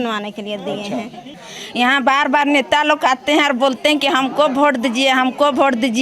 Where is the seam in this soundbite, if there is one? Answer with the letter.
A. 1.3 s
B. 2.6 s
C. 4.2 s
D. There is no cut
A